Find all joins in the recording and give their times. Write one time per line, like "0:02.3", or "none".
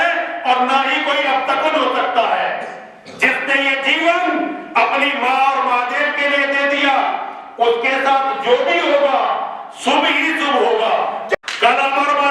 0:11.3